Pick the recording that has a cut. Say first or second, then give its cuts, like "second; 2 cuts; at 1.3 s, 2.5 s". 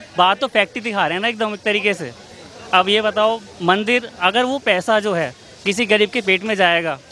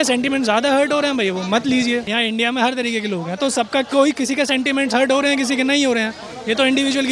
second; 1 cut; at 2.1 s